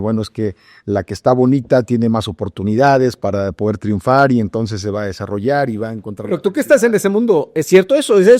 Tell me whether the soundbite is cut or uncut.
uncut